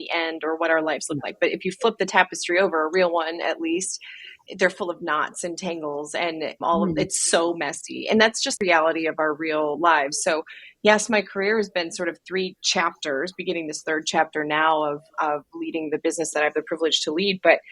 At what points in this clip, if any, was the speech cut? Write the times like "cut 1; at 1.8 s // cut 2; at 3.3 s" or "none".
none